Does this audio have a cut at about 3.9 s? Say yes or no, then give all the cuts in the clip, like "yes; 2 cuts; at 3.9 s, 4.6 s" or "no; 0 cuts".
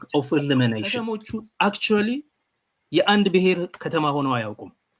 no; 1 cut; at 1.4 s